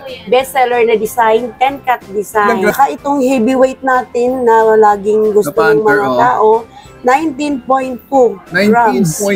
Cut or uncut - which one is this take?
cut